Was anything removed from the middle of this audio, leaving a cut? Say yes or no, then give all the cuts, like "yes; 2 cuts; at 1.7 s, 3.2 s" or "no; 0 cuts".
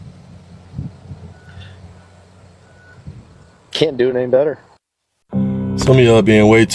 yes; 1 cut; at 5.3 s